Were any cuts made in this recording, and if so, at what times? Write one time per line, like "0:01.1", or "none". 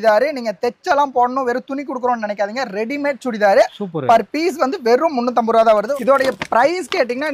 0:05.9